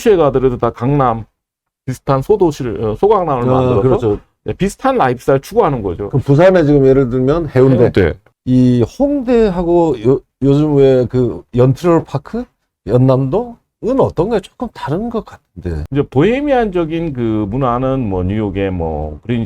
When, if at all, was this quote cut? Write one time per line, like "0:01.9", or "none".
0:08.2
0:15.8